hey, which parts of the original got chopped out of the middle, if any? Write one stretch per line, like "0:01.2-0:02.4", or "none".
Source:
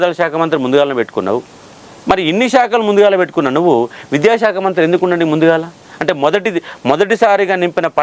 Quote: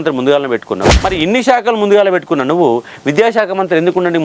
0:01.4-0:02.0